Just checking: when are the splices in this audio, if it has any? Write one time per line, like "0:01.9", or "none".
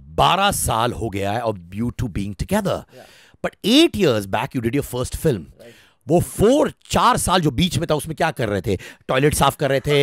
none